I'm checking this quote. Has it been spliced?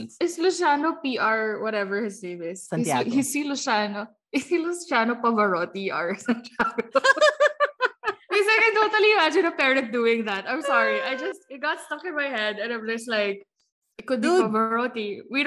no; 0 cuts

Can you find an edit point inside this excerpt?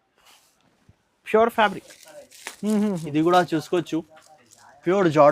yes; 1 cut; at 1.9 s

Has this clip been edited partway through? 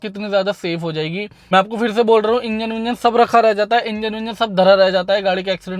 yes; 1 cut; at 1.5 s

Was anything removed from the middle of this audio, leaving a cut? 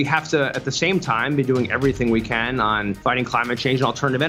yes; 1 cut; at 3.0 s

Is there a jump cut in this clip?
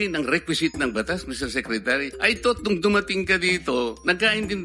yes; 1 cut; at 2.1 s

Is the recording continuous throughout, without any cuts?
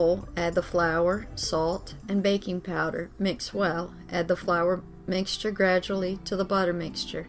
yes; 0 cuts

